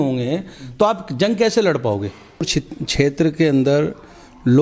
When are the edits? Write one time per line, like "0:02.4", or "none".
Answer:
0:02.5